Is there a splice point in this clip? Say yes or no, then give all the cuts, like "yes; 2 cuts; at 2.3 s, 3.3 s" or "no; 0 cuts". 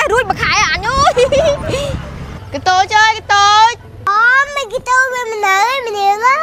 no; 0 cuts